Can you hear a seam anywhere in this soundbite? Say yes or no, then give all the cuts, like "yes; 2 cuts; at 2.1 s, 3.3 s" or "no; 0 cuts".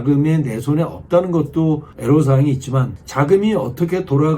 yes; 2 cuts; at 1.9 s, 3.0 s